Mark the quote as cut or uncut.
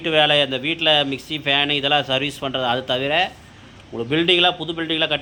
uncut